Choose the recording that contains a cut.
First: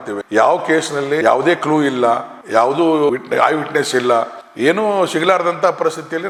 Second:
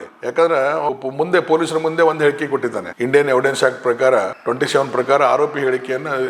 second; 2 cuts; at 0.9 s, 4.4 s

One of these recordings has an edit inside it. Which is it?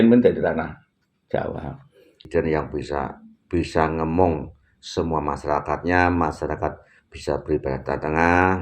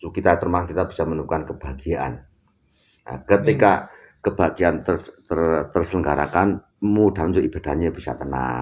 first; 1 cut; at 2.3 s

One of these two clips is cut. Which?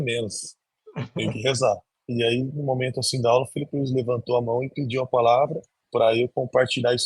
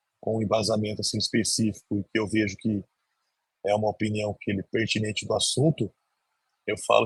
first; 1 cut; at 1.9 s

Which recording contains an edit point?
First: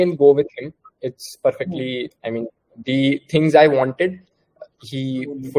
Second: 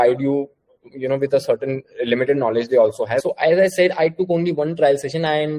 second; 1 cut; at 3.2 s

